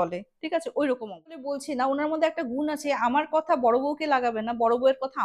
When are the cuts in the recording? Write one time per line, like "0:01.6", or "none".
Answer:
0:01.5